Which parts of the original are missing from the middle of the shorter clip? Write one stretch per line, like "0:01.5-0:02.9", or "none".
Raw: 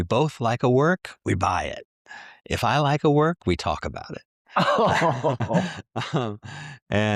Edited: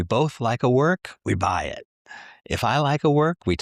none